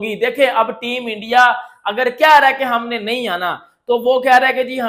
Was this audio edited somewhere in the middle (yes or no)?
no